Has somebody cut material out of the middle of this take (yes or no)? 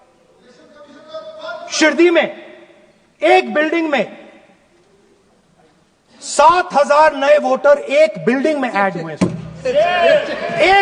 no